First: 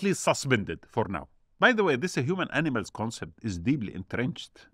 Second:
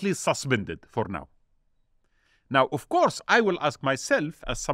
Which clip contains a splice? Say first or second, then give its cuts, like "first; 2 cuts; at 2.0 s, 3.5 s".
first; 1 cut; at 1.4 s